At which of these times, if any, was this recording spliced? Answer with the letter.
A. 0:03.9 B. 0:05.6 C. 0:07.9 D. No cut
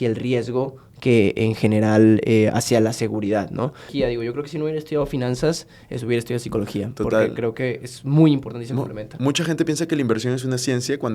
A